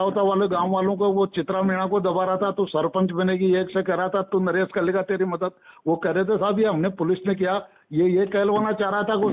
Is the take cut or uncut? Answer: uncut